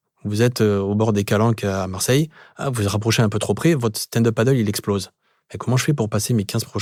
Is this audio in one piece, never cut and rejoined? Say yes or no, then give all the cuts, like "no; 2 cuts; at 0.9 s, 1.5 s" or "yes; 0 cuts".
yes; 0 cuts